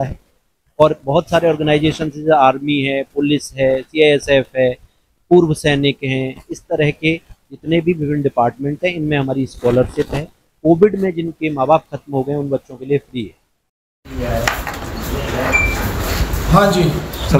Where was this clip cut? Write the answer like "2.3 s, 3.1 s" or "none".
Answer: none